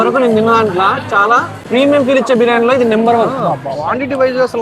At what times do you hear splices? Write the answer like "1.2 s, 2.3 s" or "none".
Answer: 1.5 s, 3.3 s